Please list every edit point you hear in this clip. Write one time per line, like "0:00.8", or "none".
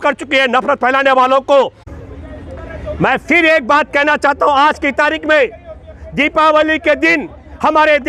0:01.8